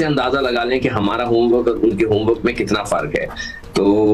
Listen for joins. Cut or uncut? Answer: cut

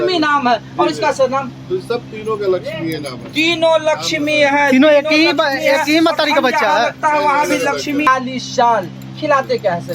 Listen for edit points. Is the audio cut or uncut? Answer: cut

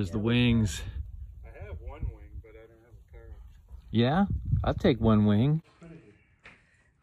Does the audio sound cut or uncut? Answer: cut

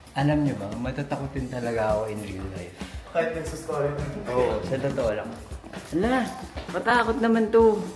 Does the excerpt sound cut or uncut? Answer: uncut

